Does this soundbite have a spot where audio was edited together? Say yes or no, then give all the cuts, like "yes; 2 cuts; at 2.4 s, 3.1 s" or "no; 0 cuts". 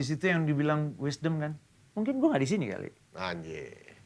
no; 0 cuts